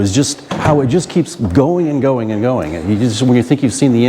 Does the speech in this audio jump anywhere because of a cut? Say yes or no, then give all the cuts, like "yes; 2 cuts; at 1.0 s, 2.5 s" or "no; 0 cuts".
no; 0 cuts